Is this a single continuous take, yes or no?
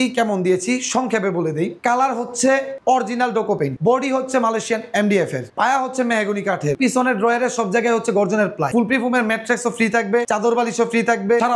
yes